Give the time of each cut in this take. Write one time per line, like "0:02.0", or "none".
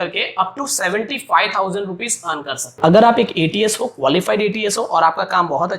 0:02.7